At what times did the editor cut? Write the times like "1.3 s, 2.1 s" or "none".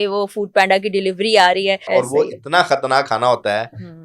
1.8 s